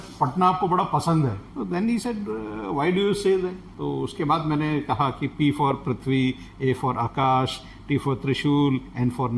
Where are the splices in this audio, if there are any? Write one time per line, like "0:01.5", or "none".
0:01.5
0:03.7